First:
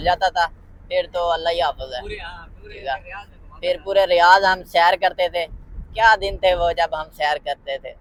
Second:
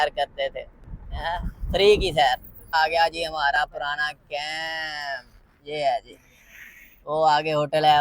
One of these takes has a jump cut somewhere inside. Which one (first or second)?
second